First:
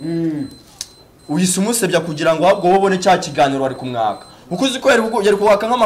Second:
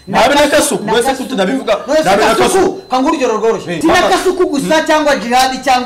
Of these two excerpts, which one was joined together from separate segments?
second; 1 cut; at 3.7 s

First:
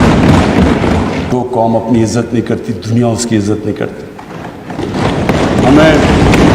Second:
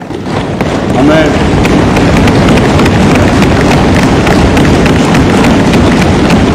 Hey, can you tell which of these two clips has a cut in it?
first; 1 cut; at 1.3 s

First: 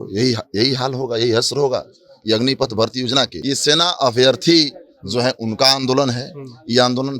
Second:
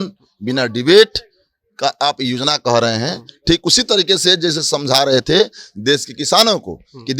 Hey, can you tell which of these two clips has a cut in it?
first; 1 cut; at 3.4 s

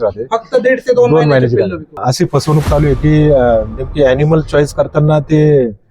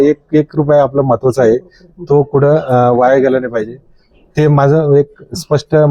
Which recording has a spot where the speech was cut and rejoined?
first; 1 cut; at 2.0 s

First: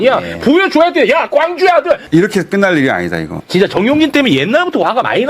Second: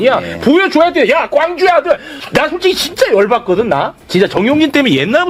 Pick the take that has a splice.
first; 2 cuts; at 2.0 s, 3.4 s

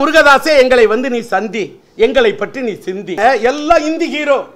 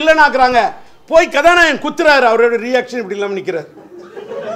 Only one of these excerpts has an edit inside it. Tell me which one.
first; 1 cut; at 3.2 s

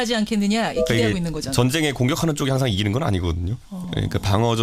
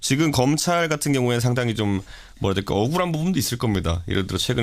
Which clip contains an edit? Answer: second; 1 cut; at 1.4 s

